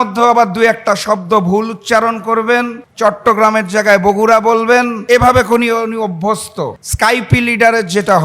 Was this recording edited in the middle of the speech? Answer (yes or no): yes